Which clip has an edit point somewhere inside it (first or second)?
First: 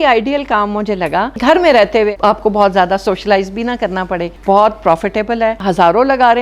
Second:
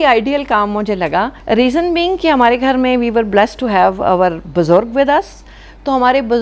first